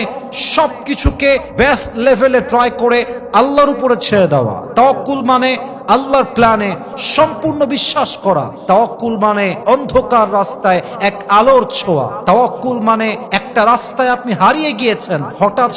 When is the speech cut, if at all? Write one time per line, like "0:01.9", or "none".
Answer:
none